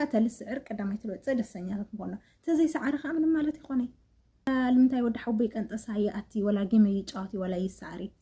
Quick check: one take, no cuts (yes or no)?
no